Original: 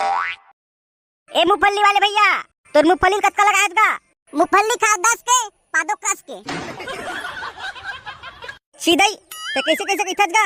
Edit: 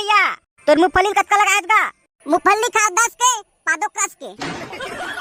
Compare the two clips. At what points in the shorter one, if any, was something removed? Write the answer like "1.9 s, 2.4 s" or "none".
none